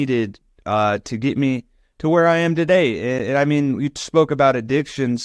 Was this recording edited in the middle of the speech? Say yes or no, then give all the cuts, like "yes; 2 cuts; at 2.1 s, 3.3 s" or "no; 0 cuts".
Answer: no; 0 cuts